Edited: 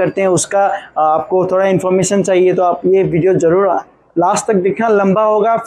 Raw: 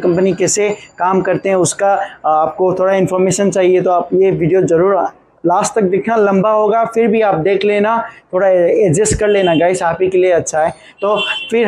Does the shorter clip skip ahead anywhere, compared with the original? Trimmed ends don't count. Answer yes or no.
no